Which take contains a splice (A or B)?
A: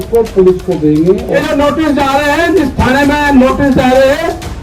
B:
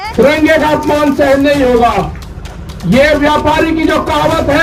A